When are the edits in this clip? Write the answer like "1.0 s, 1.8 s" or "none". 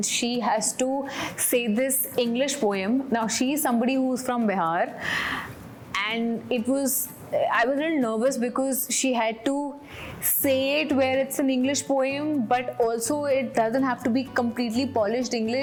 none